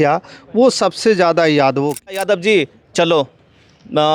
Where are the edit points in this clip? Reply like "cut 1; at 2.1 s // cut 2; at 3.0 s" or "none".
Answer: cut 1; at 2.1 s